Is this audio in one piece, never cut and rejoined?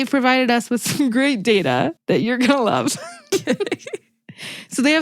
yes; 0 cuts

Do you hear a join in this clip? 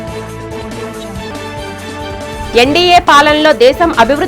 yes; 1 cut; at 1.3 s

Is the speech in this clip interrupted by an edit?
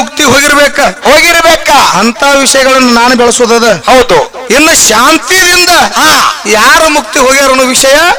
no; 0 cuts

